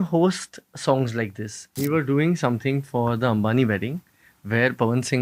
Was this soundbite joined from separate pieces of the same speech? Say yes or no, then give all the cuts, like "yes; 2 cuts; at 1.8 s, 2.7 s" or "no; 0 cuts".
yes; 1 cut; at 1.8 s